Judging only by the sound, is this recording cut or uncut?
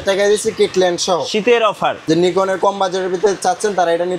cut